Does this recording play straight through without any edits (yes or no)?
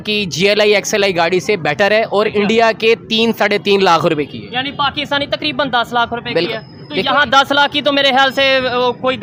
yes